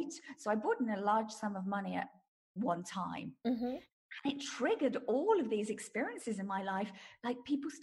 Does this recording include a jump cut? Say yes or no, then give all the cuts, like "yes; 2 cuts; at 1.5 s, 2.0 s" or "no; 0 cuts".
no; 0 cuts